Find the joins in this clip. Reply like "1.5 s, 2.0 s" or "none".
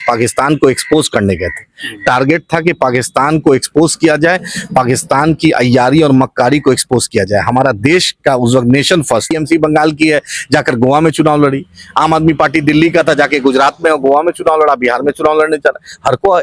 9.3 s

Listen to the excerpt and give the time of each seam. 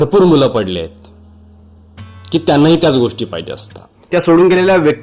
4.0 s

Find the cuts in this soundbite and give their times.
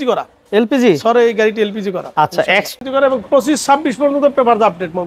2.7 s

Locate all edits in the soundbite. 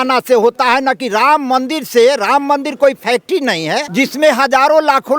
3.9 s

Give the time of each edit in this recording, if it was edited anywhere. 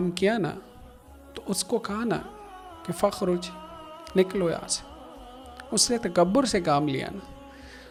none

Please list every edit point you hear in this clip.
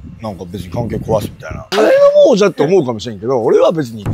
1.6 s

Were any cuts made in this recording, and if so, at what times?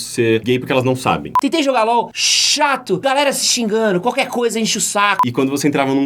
1.3 s, 3.0 s, 5.2 s

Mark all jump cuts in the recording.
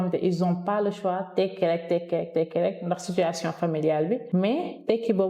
4.2 s

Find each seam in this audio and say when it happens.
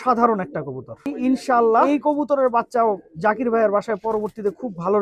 1.1 s, 1.9 s

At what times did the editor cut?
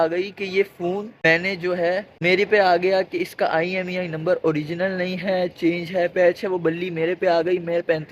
none

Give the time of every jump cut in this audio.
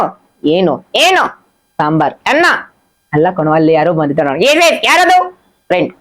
none

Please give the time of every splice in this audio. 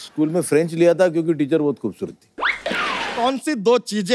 3.1 s

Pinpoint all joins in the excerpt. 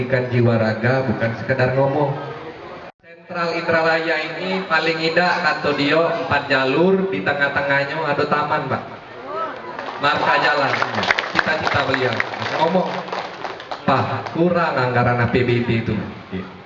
3.0 s

